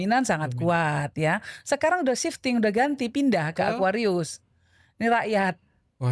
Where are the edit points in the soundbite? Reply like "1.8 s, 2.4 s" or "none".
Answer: none